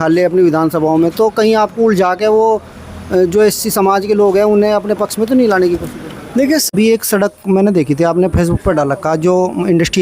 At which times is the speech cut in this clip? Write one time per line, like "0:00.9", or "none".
0:06.7

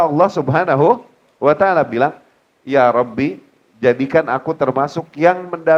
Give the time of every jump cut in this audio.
none

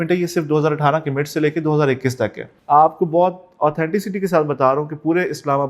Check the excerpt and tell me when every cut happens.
0:02.5

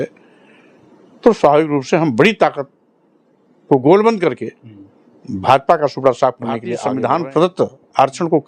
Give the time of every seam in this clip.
0:06.7

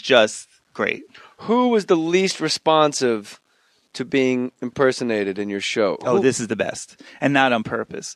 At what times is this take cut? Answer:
0:04.6

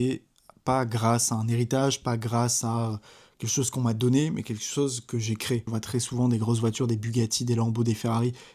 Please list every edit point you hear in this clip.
0:05.7

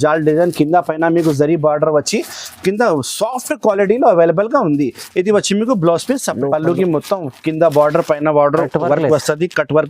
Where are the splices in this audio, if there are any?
0:06.3

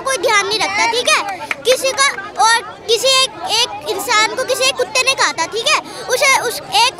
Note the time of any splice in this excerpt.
none

